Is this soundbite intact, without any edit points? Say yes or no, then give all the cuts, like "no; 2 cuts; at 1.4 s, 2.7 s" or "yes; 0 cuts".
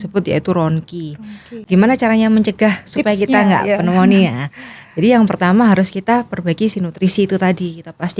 no; 1 cut; at 1.6 s